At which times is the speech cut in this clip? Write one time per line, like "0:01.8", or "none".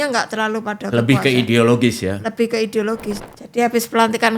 0:03.2